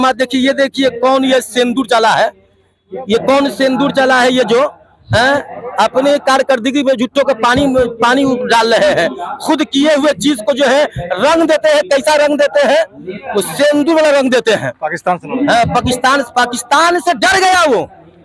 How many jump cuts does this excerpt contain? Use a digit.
0